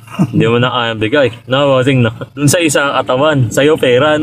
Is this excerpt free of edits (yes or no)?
yes